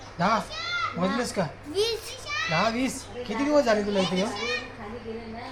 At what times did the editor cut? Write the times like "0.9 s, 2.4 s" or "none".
none